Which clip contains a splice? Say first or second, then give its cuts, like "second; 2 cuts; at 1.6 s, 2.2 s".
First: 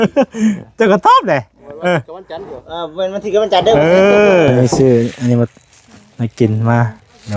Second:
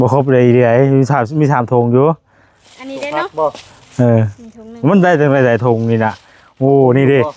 first; 1 cut; at 4.5 s